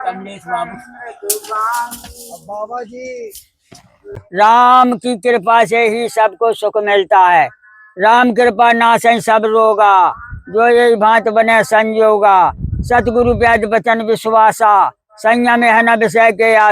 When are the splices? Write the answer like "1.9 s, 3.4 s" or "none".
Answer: 4.2 s